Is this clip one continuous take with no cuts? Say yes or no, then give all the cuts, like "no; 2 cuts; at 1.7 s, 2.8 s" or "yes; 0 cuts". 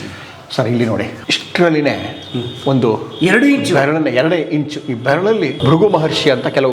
no; 2 cuts; at 1.2 s, 5.6 s